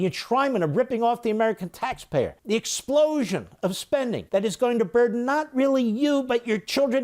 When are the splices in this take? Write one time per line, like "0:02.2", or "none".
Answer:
0:02.4
0:04.2